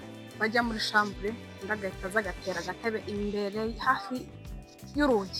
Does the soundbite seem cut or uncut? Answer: uncut